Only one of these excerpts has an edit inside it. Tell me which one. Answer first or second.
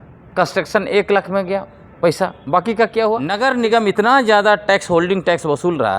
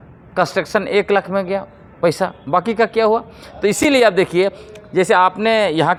first